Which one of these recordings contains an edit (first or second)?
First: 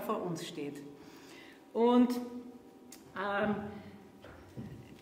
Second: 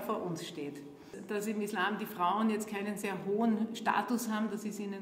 second